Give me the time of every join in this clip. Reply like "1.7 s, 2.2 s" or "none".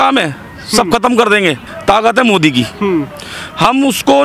1.7 s